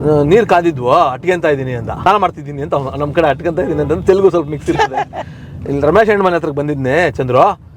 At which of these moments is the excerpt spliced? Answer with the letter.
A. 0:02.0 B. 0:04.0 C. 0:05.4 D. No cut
A